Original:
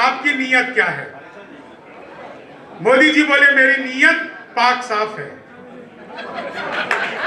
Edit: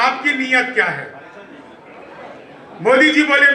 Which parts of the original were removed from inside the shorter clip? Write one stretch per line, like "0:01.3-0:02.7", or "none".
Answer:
none